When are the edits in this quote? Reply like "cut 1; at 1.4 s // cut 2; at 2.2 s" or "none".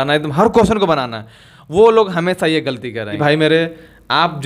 cut 1; at 3.1 s